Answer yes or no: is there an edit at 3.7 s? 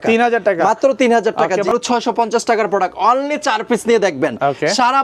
no